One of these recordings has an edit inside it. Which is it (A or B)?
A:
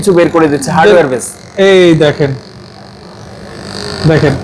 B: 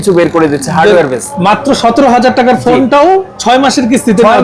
B